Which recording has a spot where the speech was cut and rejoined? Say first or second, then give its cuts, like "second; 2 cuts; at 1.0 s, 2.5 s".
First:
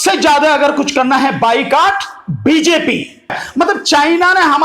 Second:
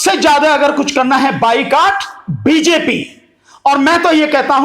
first; 1 cut; at 3.4 s